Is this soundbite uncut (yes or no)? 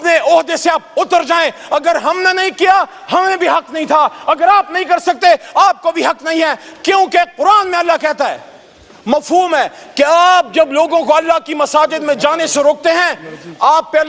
yes